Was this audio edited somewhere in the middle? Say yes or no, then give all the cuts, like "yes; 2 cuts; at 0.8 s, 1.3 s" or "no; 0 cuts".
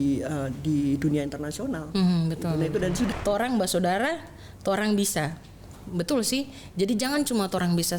yes; 1 cut; at 3.1 s